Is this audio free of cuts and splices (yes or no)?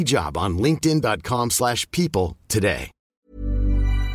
no